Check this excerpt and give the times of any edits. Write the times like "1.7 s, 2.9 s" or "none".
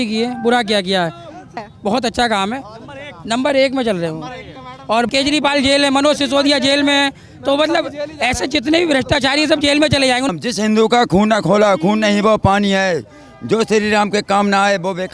1.7 s, 5.1 s, 10.3 s